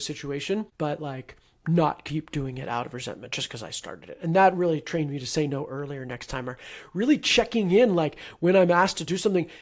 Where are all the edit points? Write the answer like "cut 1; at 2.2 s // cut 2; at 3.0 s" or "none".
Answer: none